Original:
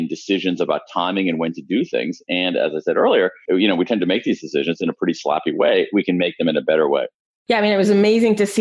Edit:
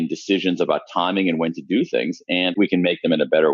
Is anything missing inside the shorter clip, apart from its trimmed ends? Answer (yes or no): yes